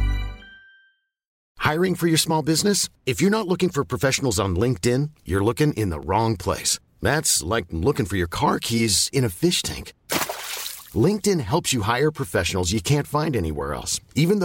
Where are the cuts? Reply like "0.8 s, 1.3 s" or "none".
1.4 s